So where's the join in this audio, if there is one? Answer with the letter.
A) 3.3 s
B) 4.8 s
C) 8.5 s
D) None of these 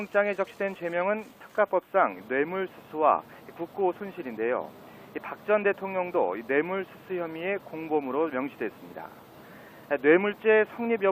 C